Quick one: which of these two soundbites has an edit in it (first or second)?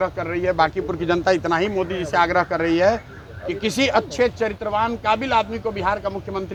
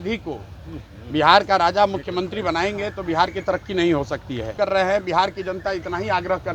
second